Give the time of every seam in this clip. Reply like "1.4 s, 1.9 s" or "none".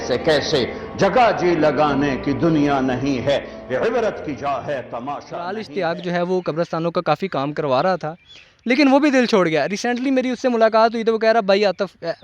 5.6 s